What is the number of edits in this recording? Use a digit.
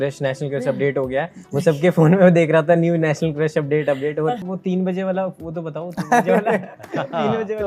1